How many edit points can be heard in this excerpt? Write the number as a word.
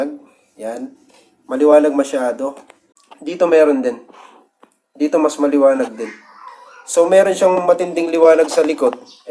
zero